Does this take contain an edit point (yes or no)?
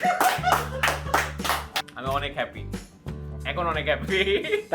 yes